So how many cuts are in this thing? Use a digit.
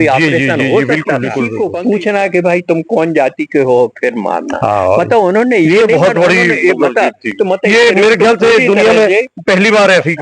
1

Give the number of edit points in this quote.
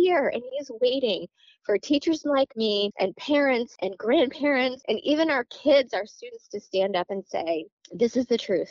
4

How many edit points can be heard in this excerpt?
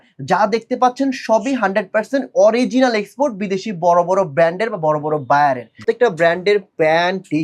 1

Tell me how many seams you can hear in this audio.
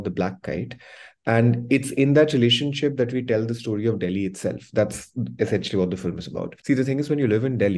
1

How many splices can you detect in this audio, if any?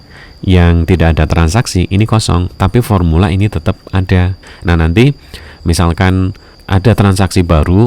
2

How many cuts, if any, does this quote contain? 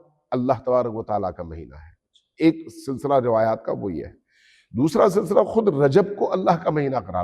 0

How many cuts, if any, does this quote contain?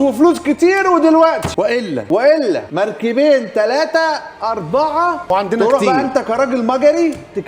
2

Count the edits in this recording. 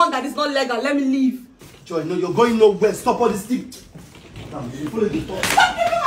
0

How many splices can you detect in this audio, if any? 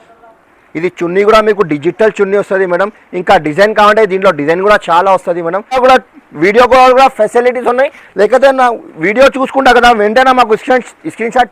1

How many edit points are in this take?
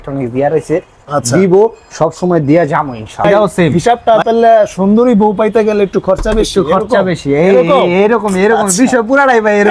1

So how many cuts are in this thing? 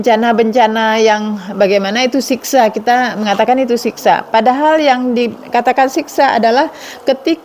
0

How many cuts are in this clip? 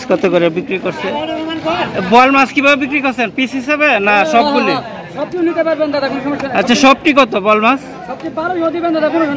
0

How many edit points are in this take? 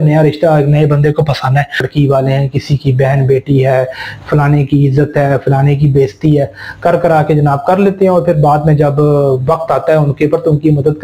1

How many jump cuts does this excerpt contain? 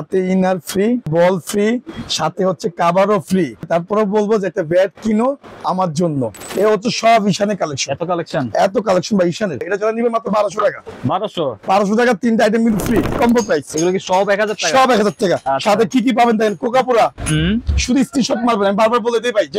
5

